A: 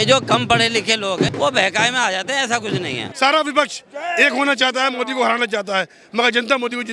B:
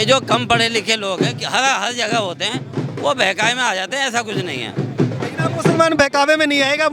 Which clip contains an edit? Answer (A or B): A